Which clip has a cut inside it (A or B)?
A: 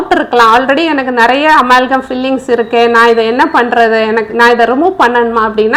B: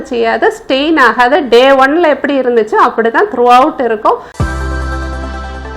B